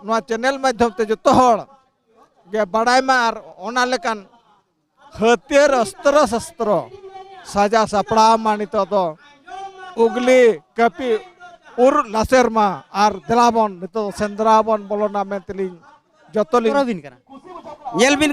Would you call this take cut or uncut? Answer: cut